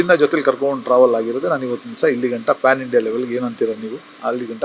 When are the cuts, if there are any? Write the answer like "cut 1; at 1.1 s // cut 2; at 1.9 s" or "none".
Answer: none